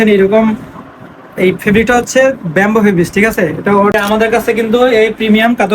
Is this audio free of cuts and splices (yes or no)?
no